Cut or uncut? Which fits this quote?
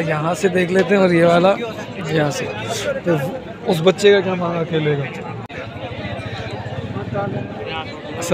cut